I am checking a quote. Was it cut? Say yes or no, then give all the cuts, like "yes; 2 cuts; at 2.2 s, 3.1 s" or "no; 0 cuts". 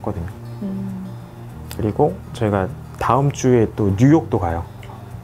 yes; 1 cut; at 1.6 s